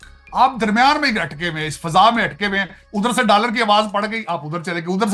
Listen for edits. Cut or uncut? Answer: uncut